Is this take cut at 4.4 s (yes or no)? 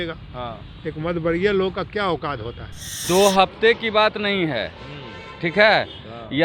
no